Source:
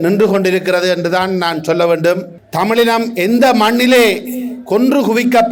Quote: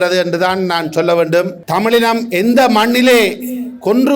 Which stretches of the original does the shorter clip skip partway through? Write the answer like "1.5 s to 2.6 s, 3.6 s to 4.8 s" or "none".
2.3 s to 2.4 s